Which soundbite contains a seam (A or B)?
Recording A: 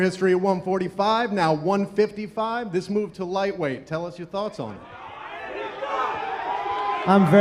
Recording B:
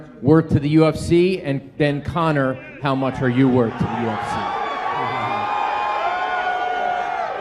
B